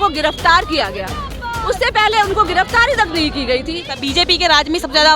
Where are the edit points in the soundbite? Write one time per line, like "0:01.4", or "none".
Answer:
0:04.0